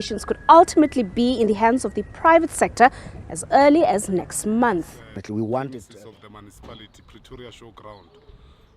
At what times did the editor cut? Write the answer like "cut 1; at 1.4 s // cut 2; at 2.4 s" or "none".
cut 1; at 5.8 s